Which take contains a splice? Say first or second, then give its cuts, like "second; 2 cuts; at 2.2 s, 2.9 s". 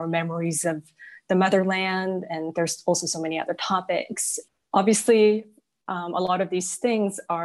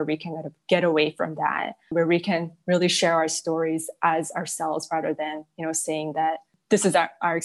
second; 2 cuts; at 1.9 s, 6.6 s